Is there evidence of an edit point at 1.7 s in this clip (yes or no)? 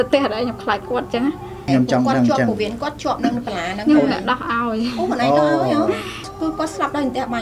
yes